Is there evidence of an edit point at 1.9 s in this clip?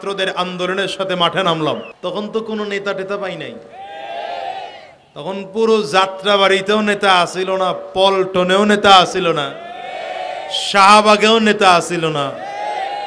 yes; 1 cut; at 1.9 s

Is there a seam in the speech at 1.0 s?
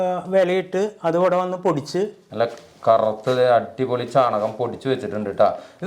no; 1 cut; at 2.2 s

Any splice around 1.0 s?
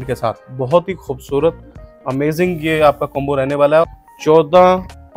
no; 1 cut; at 3.8 s

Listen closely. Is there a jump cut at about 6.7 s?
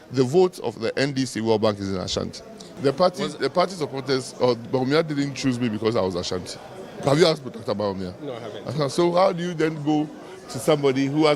no; 1 cut; at 2.7 s

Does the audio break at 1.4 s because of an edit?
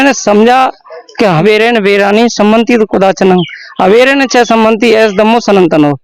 yes; 1 cut; at 1.4 s

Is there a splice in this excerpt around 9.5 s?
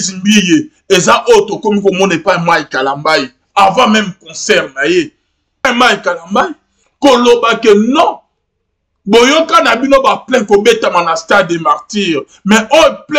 no; 1 cut; at 5.6 s

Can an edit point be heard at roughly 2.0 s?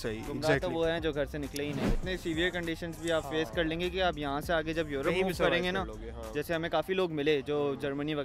yes; 1 cut; at 2.0 s

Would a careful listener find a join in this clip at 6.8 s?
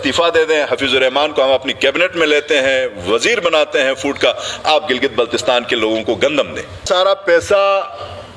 yes; 1 cut; at 6.8 s

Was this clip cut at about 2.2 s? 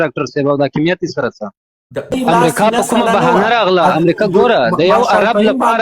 yes; 1 cut; at 2.2 s

